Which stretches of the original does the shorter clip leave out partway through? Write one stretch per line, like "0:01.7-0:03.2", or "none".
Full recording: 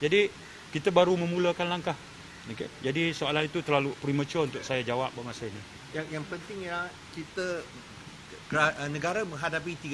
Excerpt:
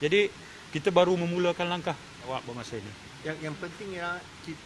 0:02.3-0:05.0